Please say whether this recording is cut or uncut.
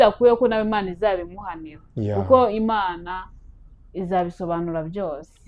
uncut